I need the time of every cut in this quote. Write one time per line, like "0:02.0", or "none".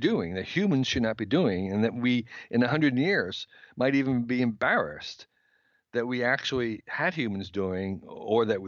none